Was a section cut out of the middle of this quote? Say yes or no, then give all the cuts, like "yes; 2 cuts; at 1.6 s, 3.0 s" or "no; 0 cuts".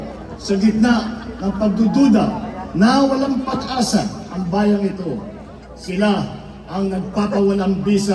no; 0 cuts